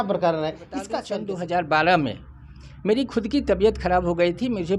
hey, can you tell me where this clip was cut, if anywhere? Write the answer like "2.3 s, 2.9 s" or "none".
1.1 s

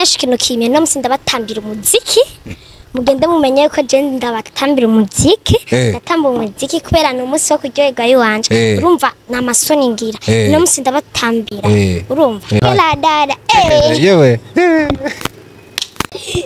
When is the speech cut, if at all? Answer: 12.6 s

